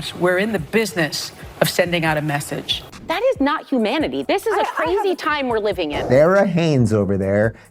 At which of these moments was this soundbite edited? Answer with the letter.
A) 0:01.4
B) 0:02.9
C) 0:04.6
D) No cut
B